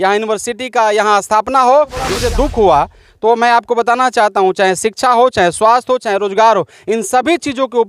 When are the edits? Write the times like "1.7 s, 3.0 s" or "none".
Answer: 2.2 s